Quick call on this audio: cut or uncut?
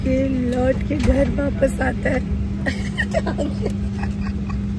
uncut